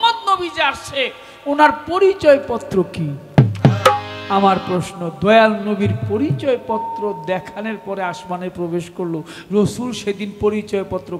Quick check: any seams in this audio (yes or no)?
no